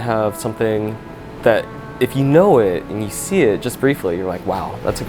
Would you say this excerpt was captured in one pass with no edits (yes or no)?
yes